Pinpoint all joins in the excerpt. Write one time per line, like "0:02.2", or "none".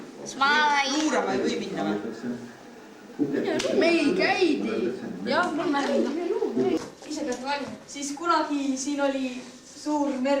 0:06.8